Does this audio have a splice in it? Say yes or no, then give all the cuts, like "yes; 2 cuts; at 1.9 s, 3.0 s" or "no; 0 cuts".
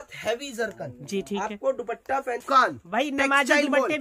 yes; 1 cut; at 2.4 s